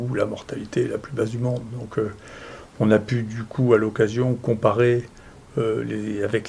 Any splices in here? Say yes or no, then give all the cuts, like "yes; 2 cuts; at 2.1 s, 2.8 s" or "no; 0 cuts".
no; 0 cuts